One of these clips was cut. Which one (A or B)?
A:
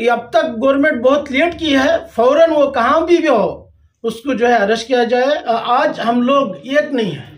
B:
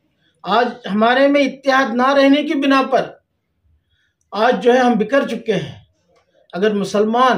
A